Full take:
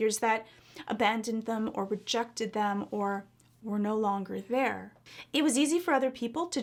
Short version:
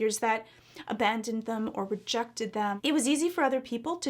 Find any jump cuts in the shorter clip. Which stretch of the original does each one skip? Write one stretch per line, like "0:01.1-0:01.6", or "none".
0:02.8-0:05.3